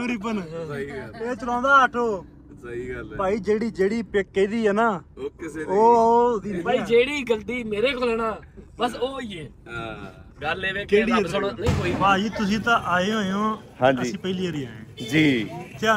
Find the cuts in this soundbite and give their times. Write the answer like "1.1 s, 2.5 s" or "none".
11.8 s